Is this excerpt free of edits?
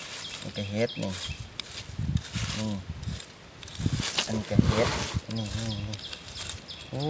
yes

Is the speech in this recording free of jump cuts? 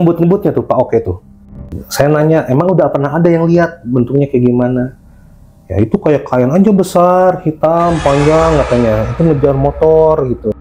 no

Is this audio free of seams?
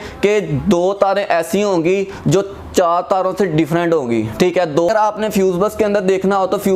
no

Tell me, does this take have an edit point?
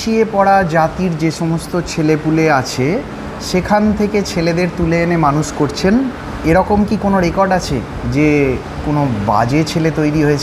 no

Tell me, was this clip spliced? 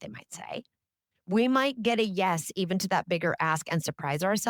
yes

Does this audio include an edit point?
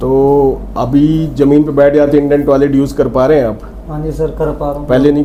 no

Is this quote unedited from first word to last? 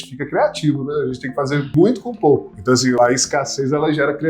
no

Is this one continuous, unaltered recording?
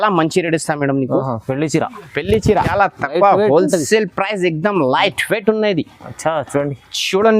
no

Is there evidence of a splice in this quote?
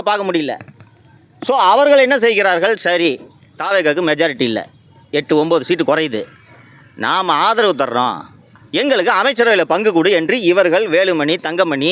no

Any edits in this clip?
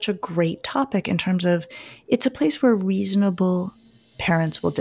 no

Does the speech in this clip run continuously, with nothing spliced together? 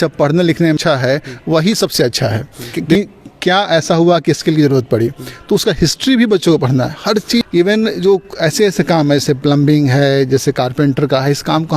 no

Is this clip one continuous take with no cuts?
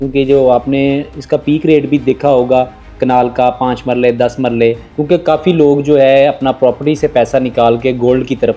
no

